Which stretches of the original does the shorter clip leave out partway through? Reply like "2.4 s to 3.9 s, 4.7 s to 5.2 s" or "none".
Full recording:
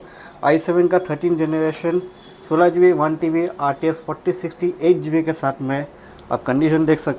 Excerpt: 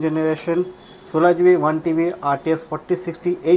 none